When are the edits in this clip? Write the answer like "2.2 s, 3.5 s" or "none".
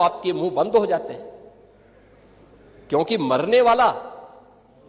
none